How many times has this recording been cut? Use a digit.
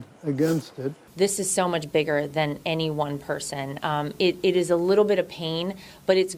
1